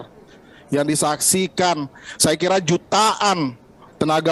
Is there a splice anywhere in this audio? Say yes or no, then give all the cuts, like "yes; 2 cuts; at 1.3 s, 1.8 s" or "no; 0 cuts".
no; 0 cuts